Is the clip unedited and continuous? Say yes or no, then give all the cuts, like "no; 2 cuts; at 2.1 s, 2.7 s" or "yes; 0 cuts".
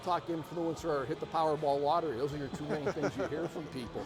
yes; 0 cuts